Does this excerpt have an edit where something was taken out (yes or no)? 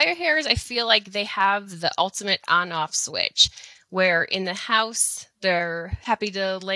no